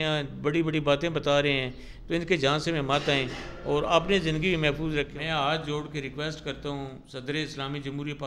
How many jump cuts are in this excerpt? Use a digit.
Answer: 2